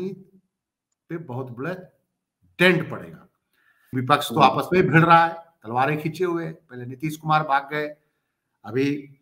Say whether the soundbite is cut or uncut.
cut